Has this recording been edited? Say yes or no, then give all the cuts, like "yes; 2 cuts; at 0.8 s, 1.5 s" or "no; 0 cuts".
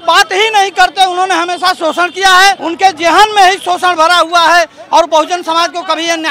yes; 1 cut; at 2.7 s